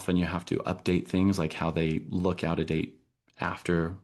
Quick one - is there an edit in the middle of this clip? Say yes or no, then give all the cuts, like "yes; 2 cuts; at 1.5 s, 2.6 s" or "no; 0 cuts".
no; 0 cuts